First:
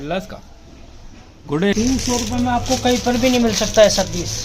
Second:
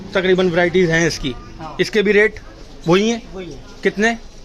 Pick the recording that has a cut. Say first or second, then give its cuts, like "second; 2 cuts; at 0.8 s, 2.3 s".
first; 1 cut; at 1.7 s